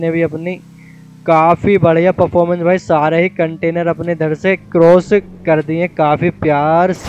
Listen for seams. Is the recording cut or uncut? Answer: uncut